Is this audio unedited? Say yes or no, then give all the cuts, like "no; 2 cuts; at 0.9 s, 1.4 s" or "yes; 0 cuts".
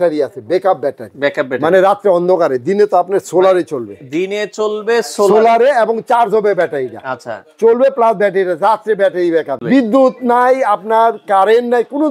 no; 1 cut; at 9.6 s